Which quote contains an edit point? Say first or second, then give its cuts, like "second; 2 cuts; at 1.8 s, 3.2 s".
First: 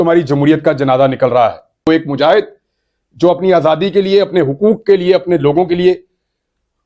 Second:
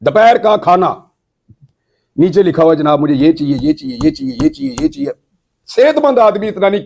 first; 1 cut; at 1.9 s